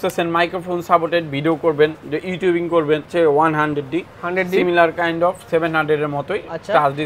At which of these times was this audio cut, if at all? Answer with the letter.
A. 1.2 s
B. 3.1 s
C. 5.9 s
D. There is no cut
B